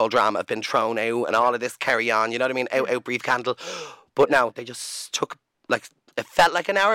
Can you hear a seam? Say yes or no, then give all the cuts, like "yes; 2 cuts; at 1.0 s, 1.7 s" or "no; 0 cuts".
no; 0 cuts